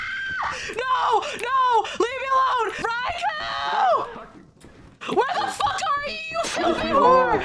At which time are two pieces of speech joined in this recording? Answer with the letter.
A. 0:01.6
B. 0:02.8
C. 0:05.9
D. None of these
B